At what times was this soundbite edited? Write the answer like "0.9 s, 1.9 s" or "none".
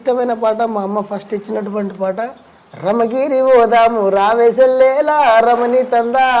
2.7 s